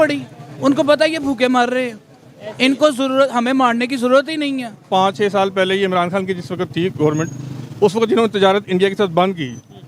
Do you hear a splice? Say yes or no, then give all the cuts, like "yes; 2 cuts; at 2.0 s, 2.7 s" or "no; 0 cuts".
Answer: yes; 1 cut; at 4.9 s